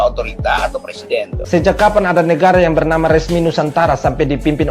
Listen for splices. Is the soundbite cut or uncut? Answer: cut